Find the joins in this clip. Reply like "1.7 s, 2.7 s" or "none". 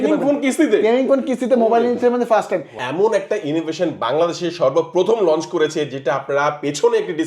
2.8 s